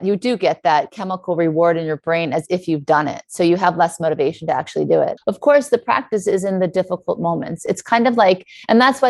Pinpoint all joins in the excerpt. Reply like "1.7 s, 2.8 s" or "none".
5.2 s